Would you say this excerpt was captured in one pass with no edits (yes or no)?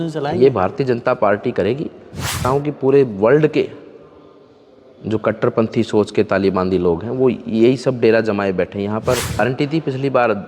no